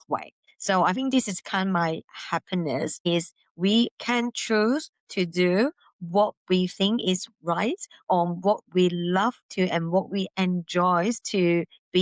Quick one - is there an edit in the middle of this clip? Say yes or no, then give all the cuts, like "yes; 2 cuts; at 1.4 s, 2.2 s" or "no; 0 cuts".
no; 0 cuts